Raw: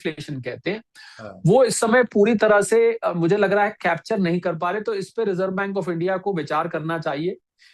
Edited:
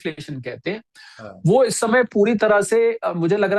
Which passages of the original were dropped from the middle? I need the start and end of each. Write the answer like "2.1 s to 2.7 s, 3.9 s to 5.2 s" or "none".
none